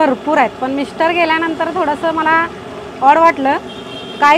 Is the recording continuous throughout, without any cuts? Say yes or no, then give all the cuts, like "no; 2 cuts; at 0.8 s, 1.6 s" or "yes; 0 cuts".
yes; 0 cuts